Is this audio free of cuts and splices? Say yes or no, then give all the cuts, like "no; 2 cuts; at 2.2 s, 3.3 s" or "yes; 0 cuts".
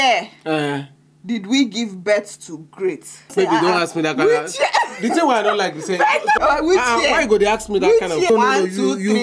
no; 3 cuts; at 3.3 s, 6.4 s, 8.3 s